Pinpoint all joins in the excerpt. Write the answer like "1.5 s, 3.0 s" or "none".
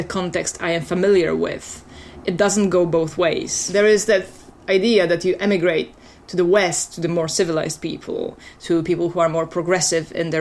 3.5 s